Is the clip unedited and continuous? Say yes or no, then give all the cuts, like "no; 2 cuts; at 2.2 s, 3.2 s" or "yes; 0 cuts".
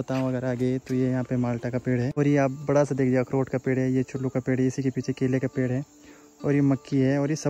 no; 1 cut; at 2.1 s